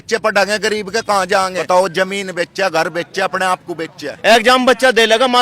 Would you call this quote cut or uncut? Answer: cut